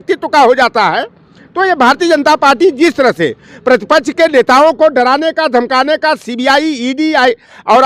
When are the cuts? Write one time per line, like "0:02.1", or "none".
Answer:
none

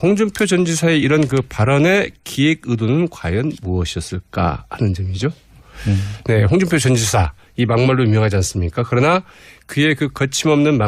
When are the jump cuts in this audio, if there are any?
none

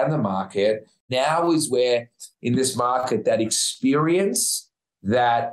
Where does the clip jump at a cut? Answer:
0:01.1

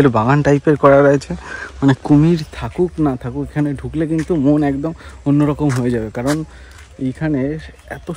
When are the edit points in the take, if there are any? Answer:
none

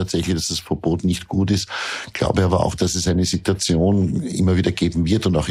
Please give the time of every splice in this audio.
none

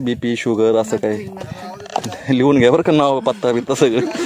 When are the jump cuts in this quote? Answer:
none

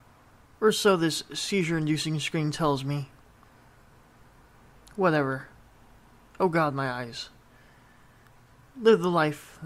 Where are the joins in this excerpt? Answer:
none

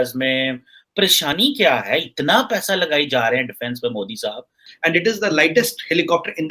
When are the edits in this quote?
0:01.0
0:04.6

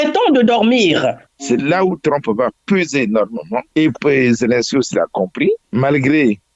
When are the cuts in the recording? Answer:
0:01.3
0:03.7
0:05.6

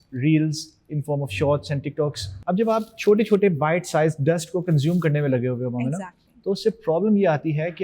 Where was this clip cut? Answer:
0:02.3

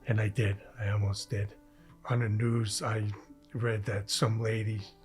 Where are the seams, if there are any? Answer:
0:01.9

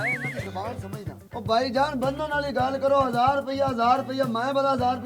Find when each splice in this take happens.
0:01.3

